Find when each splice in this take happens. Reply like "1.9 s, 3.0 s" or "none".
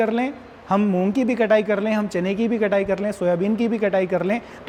none